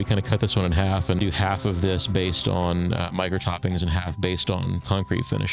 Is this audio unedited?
no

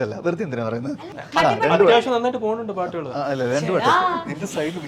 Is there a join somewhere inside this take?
yes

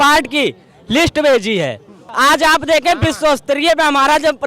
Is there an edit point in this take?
yes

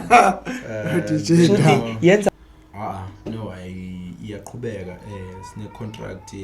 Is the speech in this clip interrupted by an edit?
yes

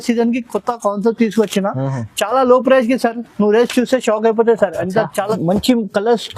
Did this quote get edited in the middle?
yes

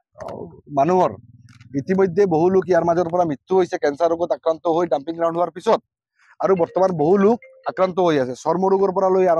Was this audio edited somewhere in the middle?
no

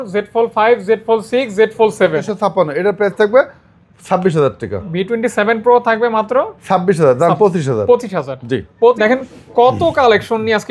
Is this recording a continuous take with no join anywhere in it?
no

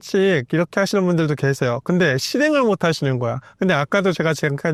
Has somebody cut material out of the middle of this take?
no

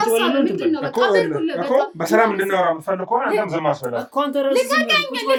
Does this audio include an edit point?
no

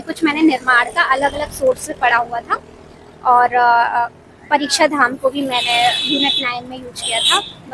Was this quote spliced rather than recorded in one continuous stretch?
no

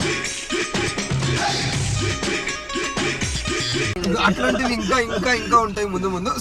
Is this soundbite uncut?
yes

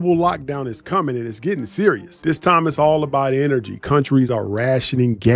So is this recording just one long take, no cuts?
yes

